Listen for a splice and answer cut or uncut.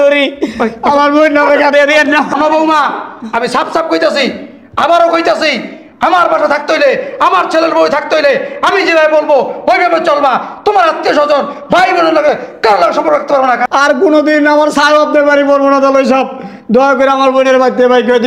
cut